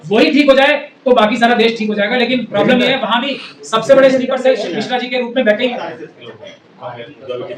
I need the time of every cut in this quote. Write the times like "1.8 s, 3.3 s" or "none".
none